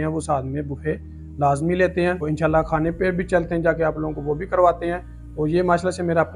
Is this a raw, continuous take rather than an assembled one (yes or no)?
yes